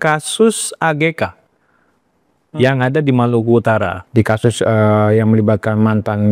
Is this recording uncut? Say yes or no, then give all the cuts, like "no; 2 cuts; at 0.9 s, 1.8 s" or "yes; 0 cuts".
no; 1 cut; at 4.0 s